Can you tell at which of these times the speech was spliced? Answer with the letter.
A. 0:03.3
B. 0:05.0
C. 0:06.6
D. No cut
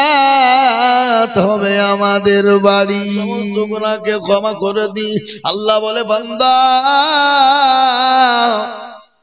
A